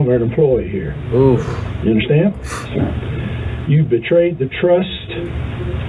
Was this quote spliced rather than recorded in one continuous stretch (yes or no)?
no